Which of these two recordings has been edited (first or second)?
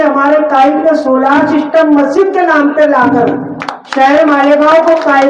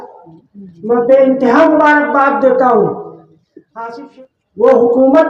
second